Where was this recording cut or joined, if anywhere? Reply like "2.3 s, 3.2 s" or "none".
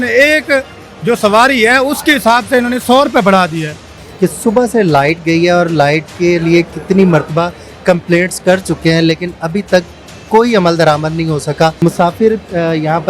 4.0 s, 11.8 s